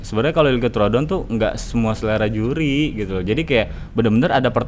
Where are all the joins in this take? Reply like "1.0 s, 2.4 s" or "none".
none